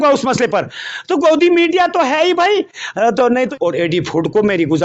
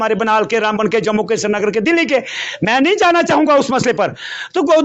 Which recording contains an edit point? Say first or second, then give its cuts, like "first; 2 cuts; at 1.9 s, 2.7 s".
first; 1 cut; at 3.5 s